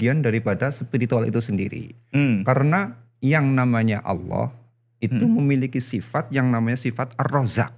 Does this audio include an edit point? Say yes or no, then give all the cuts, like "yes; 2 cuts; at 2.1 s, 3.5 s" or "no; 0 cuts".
no; 0 cuts